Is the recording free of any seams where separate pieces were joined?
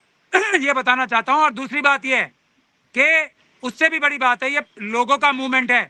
yes; 0 cuts

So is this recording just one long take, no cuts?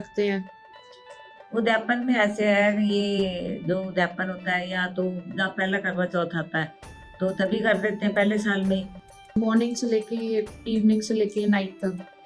no; 1 cut; at 9.3 s

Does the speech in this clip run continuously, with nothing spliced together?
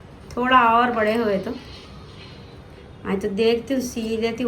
yes; 0 cuts

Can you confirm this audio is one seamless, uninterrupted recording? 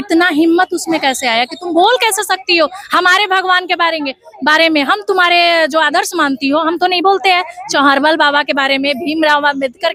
yes; 0 cuts

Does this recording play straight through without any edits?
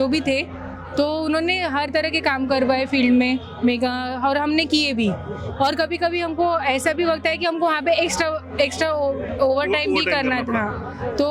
yes; 0 cuts

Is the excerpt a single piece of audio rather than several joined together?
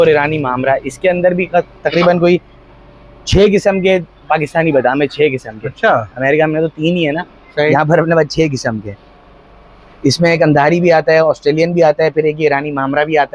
yes; 0 cuts

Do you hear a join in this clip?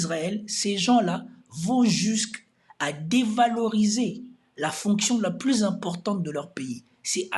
no; 0 cuts

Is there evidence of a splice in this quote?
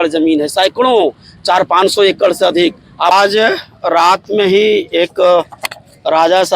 yes; 1 cut; at 3.1 s

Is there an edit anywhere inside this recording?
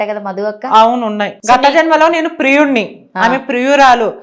yes; 1 cut; at 1.4 s

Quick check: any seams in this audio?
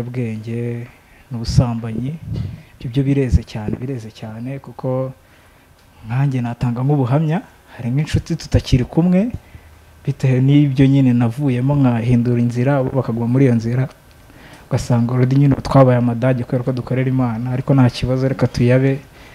no; 0 cuts

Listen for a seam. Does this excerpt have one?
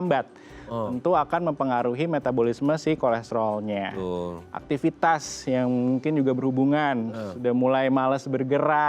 no; 0 cuts

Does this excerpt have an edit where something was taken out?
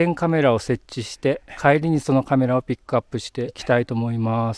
yes; 2 cuts; at 1.5 s, 3.6 s

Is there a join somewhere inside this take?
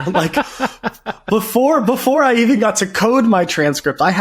no; 0 cuts

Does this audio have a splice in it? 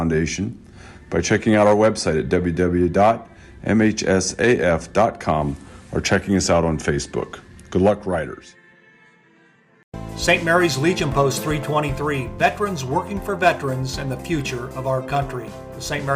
yes; 1 cut; at 9.9 s

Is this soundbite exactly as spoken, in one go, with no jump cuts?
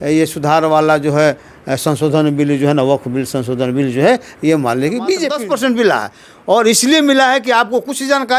no; 1 cut; at 5.3 s

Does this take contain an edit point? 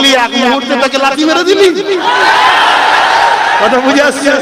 no; 0 cuts

